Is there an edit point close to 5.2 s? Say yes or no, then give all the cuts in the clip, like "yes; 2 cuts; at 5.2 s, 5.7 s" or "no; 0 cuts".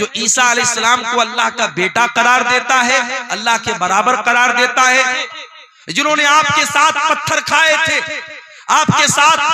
yes; 1 cut; at 5.2 s